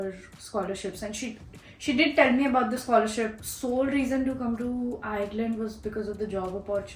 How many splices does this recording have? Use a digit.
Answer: 1